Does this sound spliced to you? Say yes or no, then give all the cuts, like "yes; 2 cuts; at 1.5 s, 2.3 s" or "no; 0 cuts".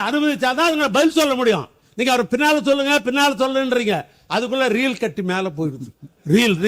no; 0 cuts